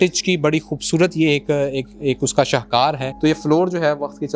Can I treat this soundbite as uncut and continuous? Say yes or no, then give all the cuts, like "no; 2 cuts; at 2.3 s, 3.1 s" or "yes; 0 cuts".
no; 1 cut; at 3.1 s